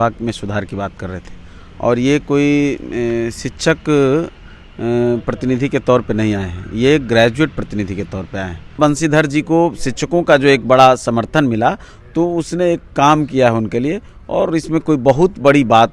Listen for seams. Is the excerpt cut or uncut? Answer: cut